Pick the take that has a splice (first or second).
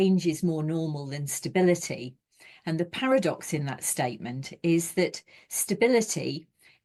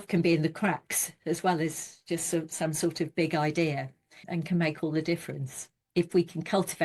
second